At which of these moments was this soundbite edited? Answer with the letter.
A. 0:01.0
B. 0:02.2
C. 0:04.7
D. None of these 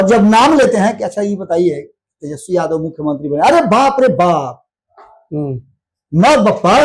D